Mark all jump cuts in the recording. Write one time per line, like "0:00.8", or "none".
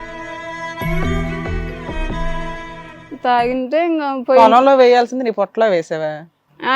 0:03.0